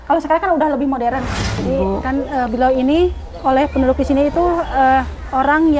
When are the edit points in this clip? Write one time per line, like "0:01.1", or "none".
0:01.6